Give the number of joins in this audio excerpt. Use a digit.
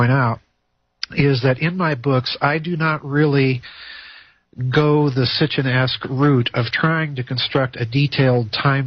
0